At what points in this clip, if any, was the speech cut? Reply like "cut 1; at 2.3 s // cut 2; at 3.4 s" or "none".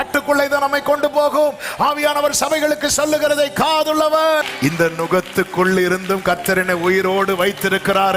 cut 1; at 4.4 s